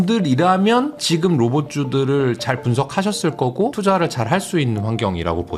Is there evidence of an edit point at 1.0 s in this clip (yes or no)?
yes